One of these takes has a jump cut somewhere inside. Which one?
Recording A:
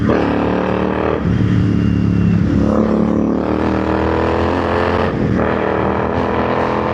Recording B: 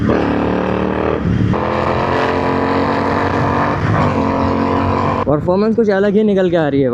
B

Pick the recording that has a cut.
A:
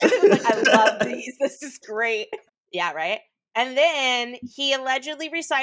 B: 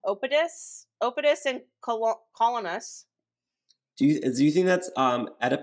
A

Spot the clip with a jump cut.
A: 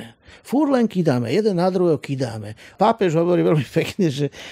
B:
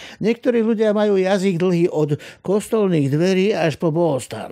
A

